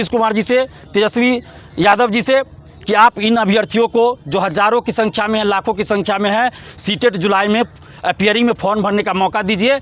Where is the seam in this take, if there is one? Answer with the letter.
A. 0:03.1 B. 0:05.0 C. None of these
C